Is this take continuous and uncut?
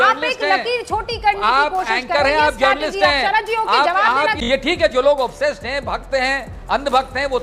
no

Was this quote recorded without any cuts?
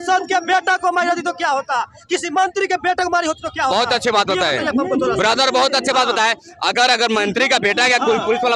yes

